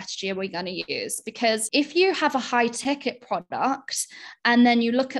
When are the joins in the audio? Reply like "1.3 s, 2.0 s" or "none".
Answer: 1.6 s